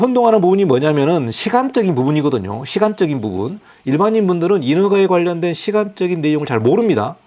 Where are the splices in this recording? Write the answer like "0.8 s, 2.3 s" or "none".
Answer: none